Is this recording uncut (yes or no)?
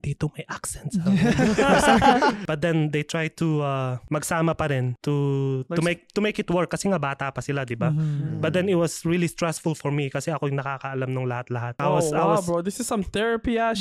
no